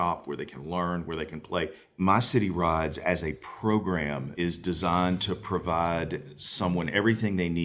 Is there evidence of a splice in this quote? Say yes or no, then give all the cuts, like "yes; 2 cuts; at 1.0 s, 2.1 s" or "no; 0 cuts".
yes; 2 cuts; at 2.0 s, 4.3 s